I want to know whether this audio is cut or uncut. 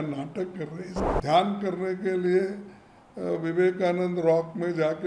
cut